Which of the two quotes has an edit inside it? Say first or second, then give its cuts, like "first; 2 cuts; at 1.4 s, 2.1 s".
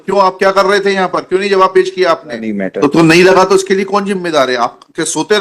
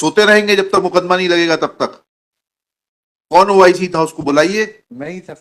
first; 1 cut; at 2.5 s